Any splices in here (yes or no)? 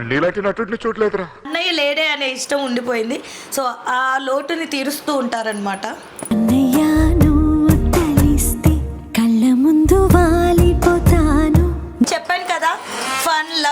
yes